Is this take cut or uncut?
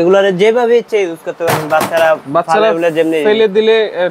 uncut